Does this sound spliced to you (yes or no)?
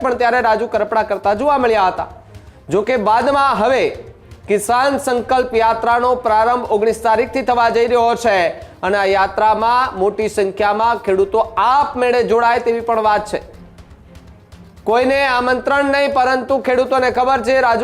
no